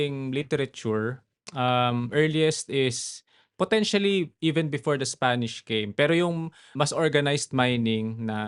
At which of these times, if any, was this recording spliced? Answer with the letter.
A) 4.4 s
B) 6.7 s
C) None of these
B